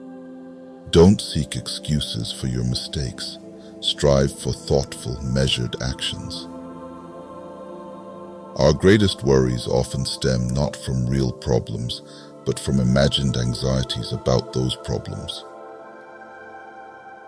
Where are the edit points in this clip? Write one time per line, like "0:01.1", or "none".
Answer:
0:00.9
0:06.2
0:08.5